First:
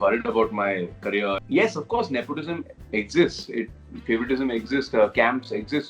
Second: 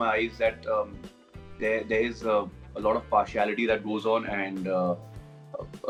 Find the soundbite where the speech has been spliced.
first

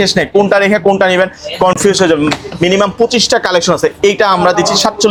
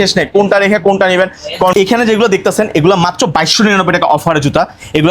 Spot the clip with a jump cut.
second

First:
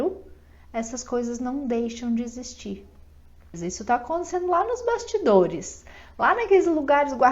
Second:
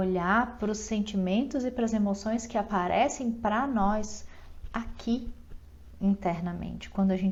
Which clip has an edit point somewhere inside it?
first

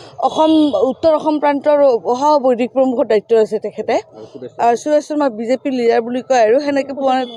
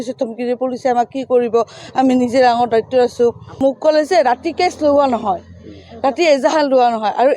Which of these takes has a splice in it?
second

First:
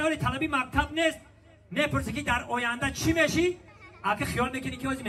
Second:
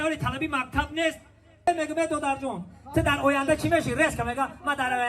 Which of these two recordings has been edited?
second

